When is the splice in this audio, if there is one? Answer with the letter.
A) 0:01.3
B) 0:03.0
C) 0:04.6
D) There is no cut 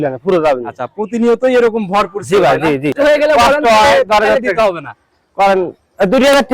B